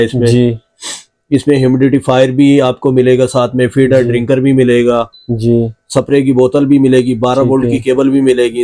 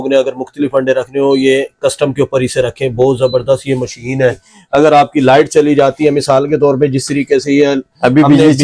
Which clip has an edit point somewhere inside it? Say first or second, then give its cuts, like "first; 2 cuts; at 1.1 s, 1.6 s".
second; 1 cut; at 4.5 s